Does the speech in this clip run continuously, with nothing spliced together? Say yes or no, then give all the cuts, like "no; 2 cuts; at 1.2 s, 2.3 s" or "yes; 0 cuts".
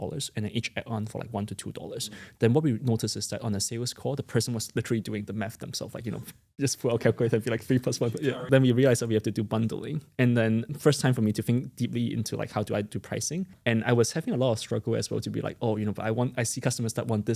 no; 3 cuts; at 8.3 s, 10.7 s, 13.5 s